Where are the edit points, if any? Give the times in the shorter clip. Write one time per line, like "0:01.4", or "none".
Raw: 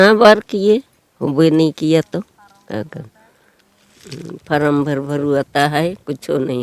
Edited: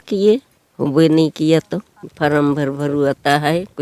0:02.0